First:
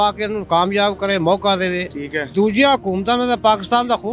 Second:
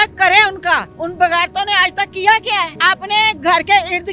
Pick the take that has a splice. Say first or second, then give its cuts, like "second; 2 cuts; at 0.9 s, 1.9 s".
second; 2 cuts; at 1.0 s, 2.7 s